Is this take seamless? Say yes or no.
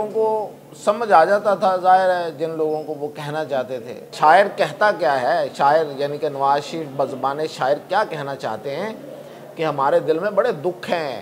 no